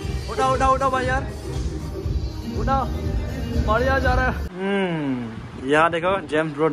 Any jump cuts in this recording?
yes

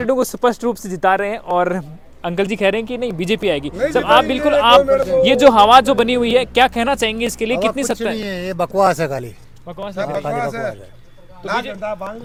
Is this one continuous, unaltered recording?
yes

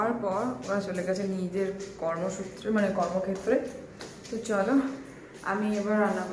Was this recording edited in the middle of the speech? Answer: no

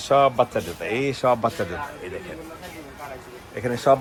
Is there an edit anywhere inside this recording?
no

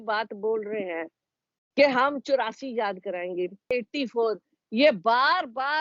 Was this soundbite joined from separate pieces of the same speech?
yes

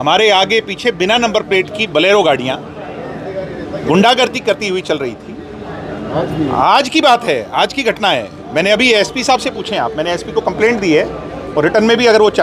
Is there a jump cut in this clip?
no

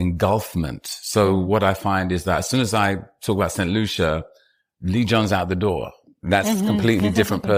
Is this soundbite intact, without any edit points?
yes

